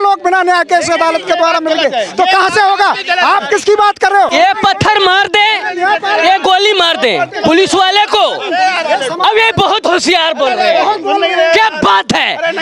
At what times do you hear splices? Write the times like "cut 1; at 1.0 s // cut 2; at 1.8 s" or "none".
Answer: cut 1; at 4.3 s